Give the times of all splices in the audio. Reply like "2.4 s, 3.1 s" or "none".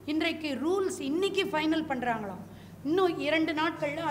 none